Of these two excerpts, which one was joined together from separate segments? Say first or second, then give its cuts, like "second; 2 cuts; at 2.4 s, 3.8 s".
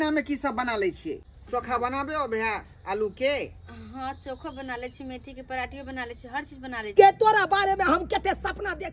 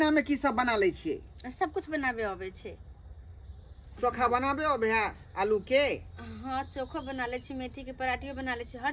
first; 2 cuts; at 1.3 s, 6.9 s